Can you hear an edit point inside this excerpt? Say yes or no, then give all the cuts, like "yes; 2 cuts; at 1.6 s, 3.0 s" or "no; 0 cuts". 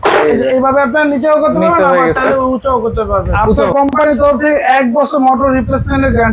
yes; 1 cut; at 3.6 s